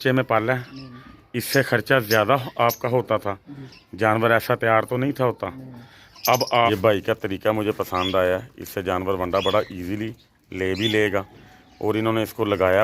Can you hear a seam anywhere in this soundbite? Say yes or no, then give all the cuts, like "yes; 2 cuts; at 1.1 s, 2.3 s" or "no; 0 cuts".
yes; 1 cut; at 6.7 s